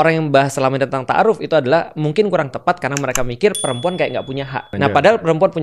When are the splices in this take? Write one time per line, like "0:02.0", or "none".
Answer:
0:04.7